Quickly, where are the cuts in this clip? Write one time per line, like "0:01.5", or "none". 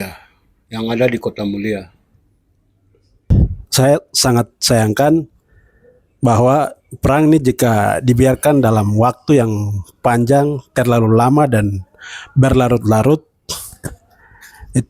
0:03.3